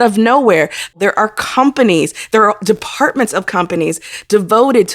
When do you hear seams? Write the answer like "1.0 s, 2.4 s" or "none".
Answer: 1.0 s

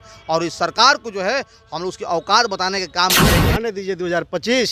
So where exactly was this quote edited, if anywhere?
3.4 s

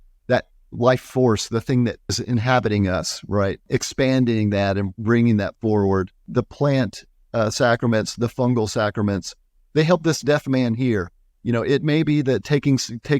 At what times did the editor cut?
2.2 s, 3.7 s, 6.3 s

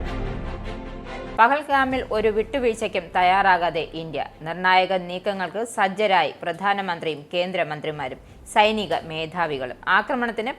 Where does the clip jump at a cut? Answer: 1.3 s

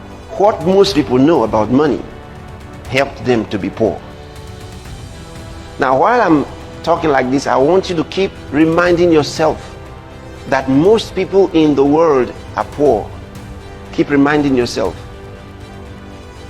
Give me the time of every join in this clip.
4.0 s, 5.7 s, 15.0 s

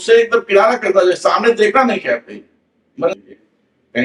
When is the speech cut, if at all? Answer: 3.1 s

